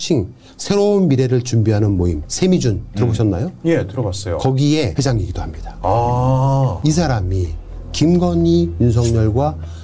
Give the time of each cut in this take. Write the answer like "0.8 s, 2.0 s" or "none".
2.2 s, 4.9 s, 6.8 s